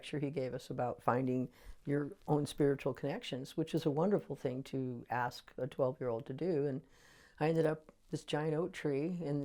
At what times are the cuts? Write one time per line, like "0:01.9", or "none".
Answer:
none